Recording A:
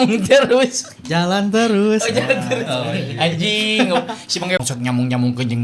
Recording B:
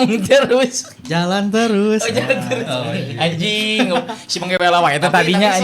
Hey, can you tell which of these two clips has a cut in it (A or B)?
A